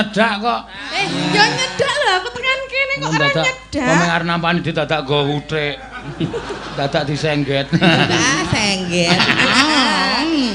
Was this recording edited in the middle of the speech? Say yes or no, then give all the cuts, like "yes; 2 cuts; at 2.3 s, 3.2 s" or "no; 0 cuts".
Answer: no; 0 cuts